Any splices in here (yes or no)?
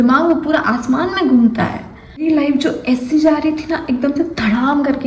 yes